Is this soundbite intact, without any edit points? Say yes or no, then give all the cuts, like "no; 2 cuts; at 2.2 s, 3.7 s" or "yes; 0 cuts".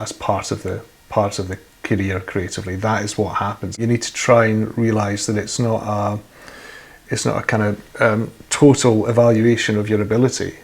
no; 1 cut; at 3.8 s